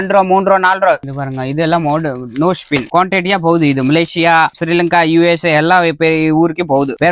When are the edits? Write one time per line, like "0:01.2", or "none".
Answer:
none